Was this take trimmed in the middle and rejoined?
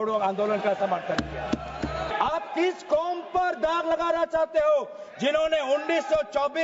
yes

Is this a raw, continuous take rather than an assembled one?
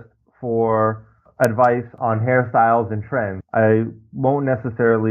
no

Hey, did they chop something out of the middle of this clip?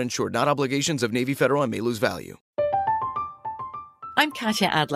yes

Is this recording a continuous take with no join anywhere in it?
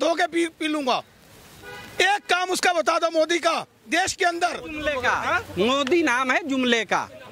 no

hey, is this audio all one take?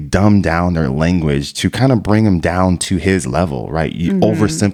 yes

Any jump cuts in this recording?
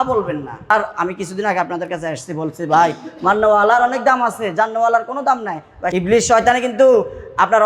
yes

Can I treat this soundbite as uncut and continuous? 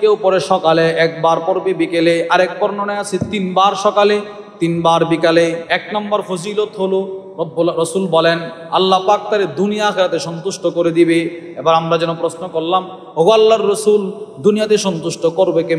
no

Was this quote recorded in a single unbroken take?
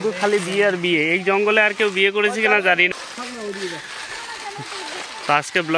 no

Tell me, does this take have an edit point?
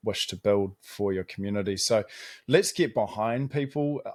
no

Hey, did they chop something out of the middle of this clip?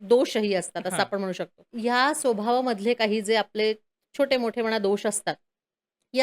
yes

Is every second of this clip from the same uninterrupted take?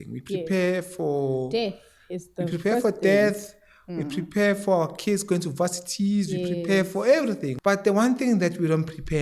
no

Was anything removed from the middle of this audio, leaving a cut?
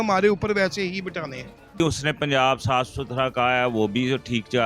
yes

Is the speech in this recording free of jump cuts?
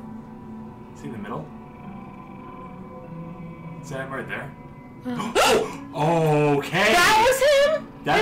yes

